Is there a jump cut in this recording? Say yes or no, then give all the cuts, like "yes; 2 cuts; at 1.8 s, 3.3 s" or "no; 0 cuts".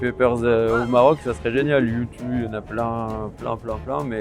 no; 0 cuts